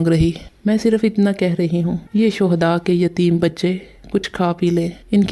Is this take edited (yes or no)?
no